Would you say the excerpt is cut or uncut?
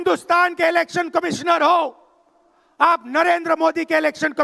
uncut